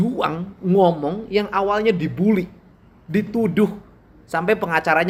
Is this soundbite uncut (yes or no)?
yes